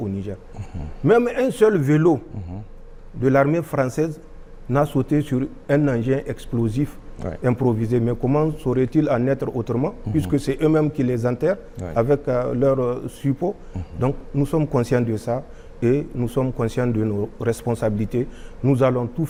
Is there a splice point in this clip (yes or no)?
no